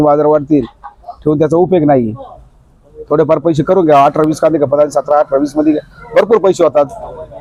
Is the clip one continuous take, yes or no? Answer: yes